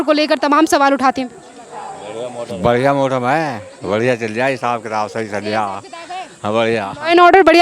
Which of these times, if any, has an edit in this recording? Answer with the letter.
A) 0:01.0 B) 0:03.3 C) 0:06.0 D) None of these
D